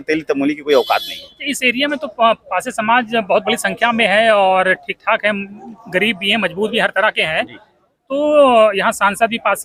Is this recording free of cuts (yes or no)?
yes